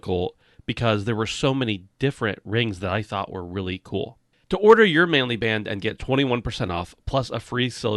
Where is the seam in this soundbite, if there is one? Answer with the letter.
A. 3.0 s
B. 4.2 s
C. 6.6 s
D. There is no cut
B